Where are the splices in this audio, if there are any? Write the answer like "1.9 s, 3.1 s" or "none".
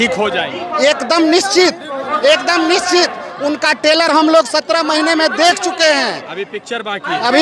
none